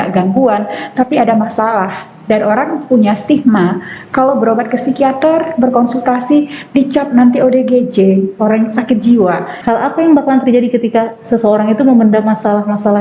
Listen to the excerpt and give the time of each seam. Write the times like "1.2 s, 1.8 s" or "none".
9.5 s